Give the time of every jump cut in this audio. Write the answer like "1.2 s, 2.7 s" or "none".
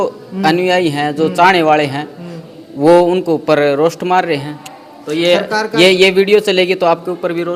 none